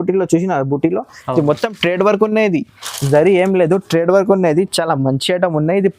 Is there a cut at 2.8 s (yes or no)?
no